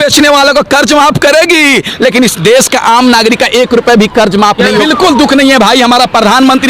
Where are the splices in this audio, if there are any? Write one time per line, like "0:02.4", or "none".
0:04.8